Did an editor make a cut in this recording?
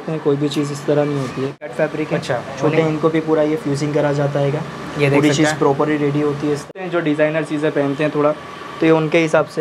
yes; 2 cuts; at 1.7 s, 6.7 s

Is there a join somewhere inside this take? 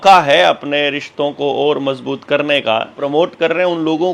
yes; 1 cut; at 3.0 s

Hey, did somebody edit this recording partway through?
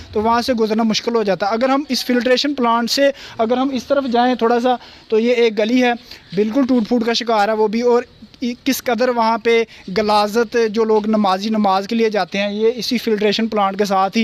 no; 0 cuts

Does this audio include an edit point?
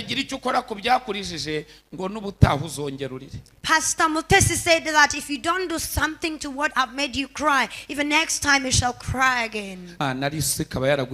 yes; 1 cut; at 9.9 s

